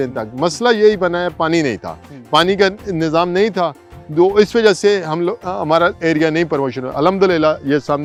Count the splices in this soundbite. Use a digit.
0